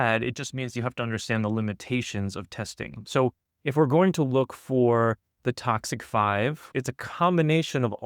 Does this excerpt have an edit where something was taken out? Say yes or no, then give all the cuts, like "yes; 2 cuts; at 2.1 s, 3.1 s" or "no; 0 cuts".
yes; 1 cut; at 6.7 s